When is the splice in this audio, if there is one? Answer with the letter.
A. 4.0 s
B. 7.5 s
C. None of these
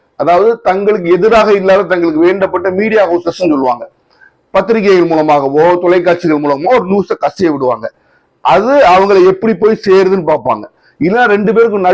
C